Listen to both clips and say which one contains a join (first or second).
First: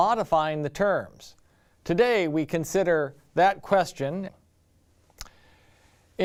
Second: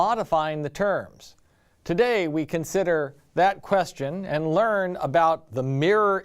second